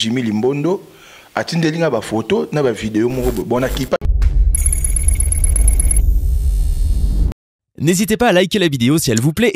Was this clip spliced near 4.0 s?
yes; 1 cut; at 4.0 s

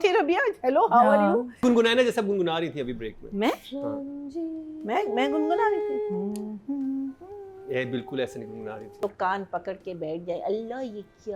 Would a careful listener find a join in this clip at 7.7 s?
no; 2 cuts; at 1.6 s, 9.0 s

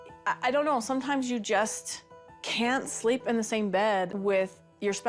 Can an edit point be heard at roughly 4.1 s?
yes; 1 cut; at 4.1 s

